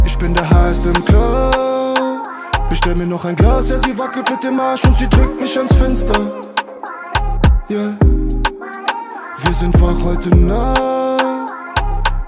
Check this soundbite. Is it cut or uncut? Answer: uncut